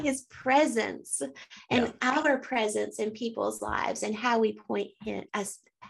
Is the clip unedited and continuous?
yes; 0 cuts

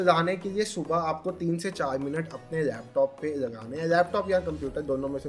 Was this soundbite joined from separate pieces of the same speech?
no; 0 cuts

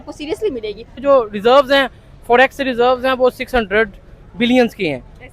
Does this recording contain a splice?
yes; 1 cut; at 1.0 s

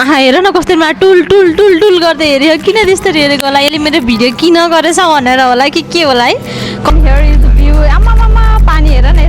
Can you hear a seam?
yes; 1 cut; at 6.9 s

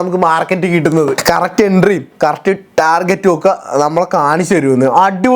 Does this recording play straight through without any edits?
no; 1 cut; at 1.2 s

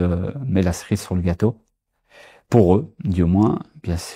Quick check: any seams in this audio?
no; 0 cuts

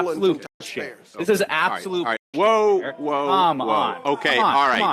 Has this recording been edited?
no; 0 cuts

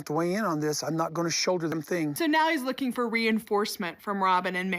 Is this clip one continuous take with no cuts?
no; 1 cut; at 1.9 s

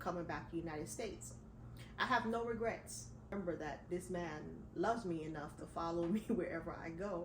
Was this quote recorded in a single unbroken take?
no; 1 cut; at 3.3 s

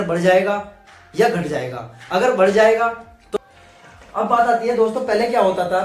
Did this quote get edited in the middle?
yes; 1 cut; at 3.2 s

